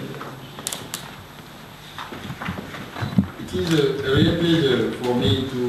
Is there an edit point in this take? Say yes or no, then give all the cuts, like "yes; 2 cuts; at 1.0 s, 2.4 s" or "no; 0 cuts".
no; 0 cuts